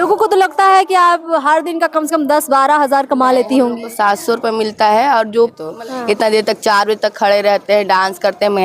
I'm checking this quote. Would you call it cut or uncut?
cut